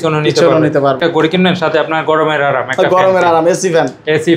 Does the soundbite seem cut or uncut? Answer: cut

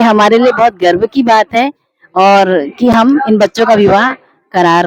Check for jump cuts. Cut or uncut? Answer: uncut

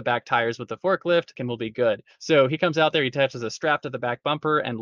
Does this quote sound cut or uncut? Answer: cut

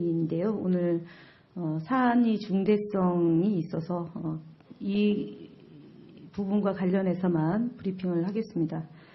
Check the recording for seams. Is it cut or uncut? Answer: uncut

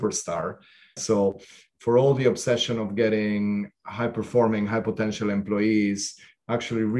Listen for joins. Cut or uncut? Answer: cut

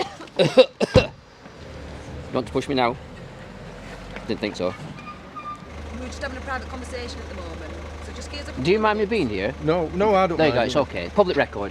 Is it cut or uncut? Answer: cut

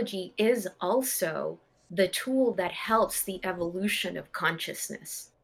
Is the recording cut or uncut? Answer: uncut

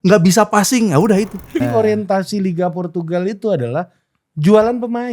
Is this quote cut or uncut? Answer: cut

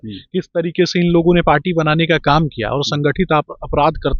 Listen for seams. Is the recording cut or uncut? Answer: uncut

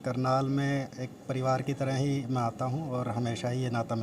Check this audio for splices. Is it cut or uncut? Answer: uncut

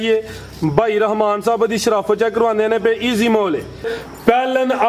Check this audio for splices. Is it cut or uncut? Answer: cut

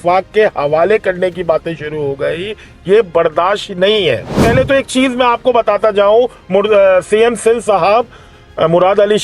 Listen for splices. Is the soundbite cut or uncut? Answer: uncut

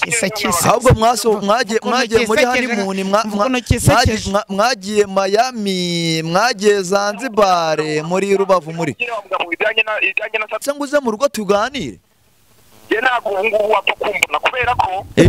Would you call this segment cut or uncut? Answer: cut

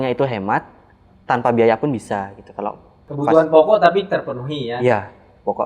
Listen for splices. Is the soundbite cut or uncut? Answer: cut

